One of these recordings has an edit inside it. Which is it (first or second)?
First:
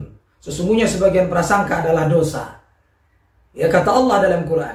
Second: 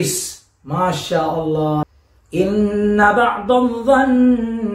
second